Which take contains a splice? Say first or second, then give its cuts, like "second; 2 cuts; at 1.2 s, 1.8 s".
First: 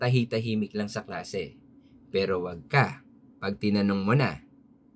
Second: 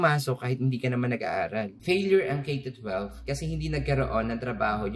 second; 1 cut; at 1.7 s